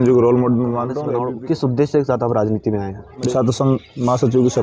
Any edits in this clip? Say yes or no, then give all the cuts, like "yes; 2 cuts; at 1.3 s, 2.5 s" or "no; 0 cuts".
yes; 2 cuts; at 1.0 s, 3.3 s